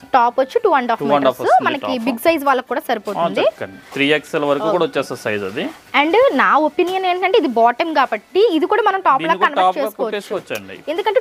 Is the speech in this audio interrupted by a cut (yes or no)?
no